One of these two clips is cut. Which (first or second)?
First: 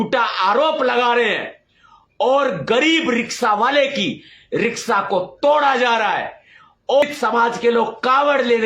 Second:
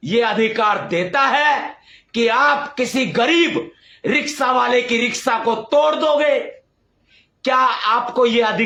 first